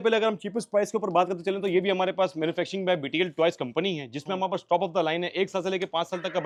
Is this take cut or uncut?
uncut